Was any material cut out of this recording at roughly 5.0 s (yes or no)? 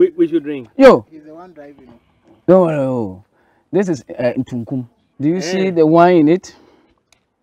yes